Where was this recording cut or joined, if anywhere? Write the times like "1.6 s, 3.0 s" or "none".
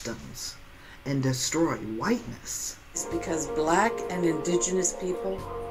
3.0 s

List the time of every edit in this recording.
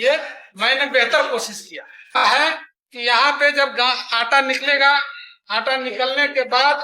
2.2 s

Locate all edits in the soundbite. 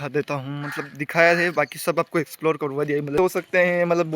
3.2 s

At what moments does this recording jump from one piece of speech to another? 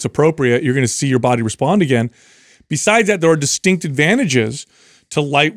none

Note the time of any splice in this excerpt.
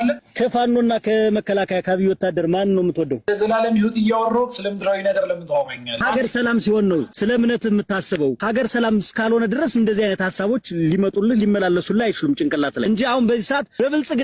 none

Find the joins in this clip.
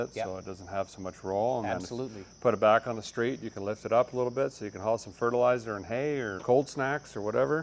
6.3 s

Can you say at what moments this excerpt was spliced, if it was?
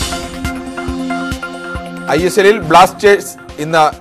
2.0 s

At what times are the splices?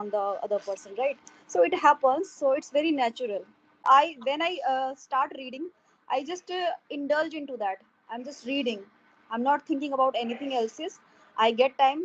3.8 s

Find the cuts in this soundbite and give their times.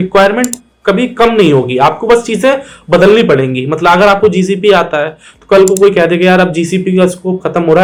none

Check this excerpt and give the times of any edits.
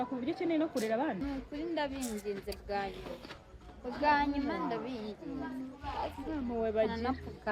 1.2 s

